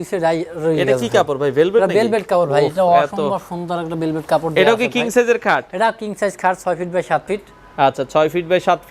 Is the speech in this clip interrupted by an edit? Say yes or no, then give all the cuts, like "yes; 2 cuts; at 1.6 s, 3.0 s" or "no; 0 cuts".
no; 0 cuts